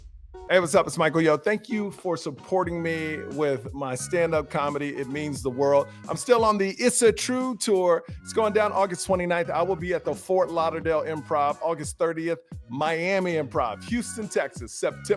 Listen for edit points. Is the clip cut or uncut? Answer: uncut